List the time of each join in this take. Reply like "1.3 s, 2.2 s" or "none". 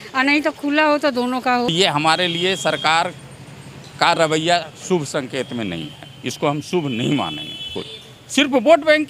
1.7 s, 7.8 s

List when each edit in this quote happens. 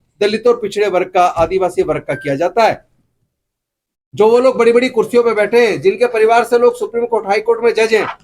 none

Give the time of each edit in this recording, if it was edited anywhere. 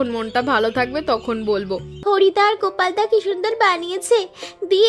1.9 s

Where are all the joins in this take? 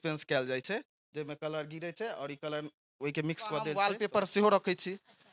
3.7 s

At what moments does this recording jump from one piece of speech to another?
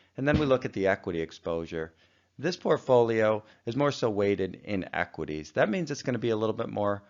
none

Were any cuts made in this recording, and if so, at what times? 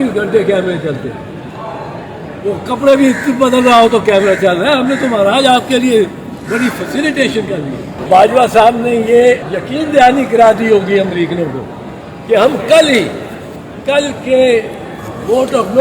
8.0 s, 9.5 s

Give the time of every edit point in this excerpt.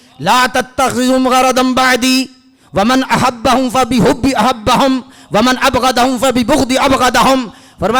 none

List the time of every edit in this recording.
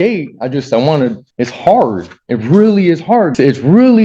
1.2 s, 3.3 s

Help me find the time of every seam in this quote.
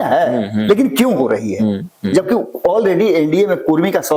none

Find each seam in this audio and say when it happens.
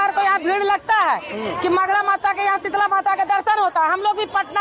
none

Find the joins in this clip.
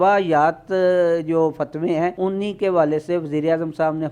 2.1 s

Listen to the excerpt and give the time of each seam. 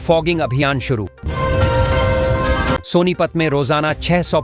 1.1 s, 2.8 s

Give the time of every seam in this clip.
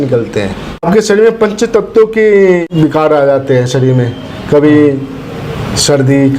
0.8 s, 2.6 s

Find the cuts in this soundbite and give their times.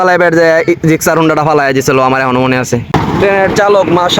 2.9 s

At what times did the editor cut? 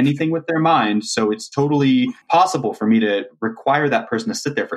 2.2 s

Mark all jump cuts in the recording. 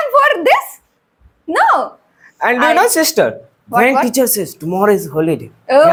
none

